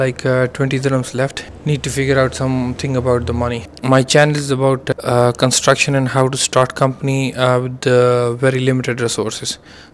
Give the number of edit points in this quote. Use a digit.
2